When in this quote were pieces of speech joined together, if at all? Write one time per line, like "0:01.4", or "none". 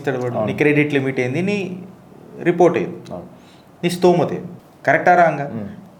none